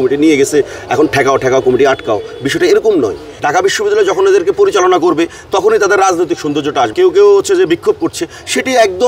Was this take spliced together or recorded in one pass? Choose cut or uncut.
cut